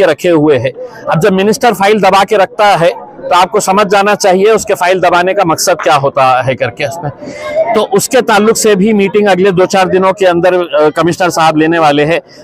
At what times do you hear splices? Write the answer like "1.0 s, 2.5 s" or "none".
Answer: none